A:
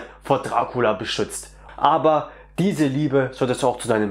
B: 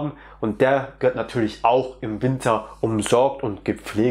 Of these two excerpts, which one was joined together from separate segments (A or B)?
A